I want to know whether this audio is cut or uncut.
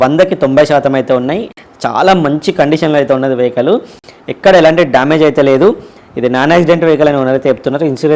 uncut